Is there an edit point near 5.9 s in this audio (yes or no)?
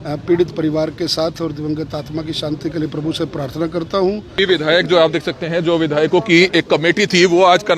no